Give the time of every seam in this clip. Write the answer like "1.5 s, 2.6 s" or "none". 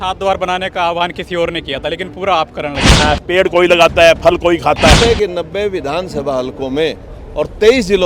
3.0 s, 4.9 s

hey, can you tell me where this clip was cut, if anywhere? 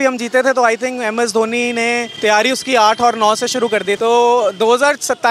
2.1 s, 4.0 s

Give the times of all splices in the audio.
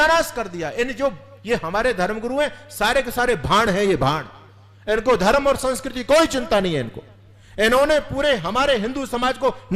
none

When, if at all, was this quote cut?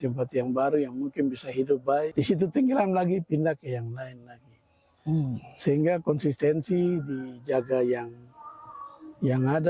2.1 s

